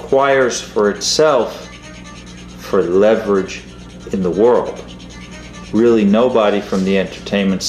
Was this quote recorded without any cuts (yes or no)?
no